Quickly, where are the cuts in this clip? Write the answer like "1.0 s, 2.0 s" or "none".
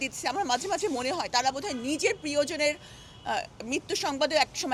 none